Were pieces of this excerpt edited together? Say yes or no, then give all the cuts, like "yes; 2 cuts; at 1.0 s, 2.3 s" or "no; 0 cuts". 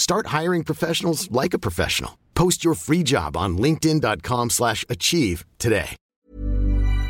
yes; 1 cut; at 6.0 s